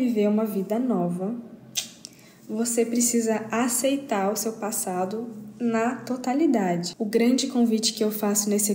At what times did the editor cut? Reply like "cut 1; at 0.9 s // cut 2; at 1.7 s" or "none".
cut 1; at 6.9 s